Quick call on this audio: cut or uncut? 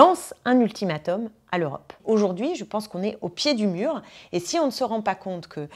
cut